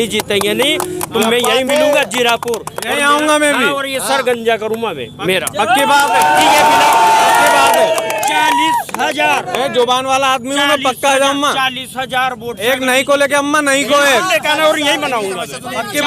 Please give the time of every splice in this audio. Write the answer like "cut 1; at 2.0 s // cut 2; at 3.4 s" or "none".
none

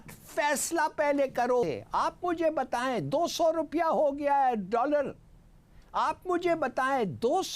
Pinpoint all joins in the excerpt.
cut 1; at 1.6 s

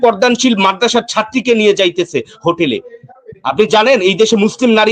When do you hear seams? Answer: none

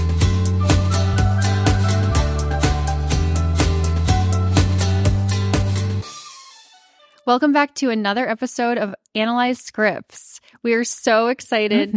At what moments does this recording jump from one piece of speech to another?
none

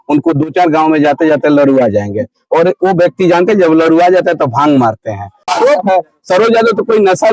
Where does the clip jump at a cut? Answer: cut 1; at 5.5 s

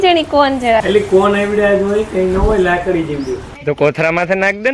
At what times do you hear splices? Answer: cut 1; at 0.8 s // cut 2; at 3.5 s

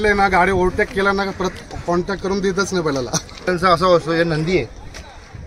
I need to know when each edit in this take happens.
cut 1; at 3.5 s

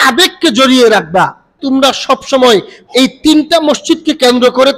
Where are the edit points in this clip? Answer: cut 1; at 1.6 s

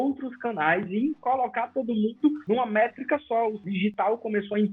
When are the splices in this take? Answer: cut 1; at 2.4 s // cut 2; at 3.6 s

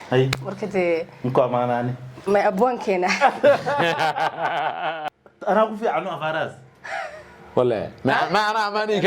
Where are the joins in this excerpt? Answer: cut 1; at 5.1 s

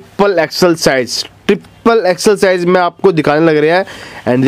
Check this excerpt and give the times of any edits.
none

